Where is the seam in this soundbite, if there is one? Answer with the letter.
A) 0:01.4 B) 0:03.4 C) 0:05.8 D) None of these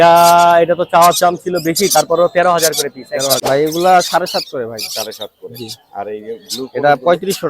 B